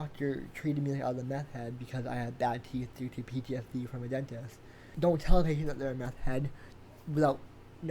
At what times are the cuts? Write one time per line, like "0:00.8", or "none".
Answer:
0:04.9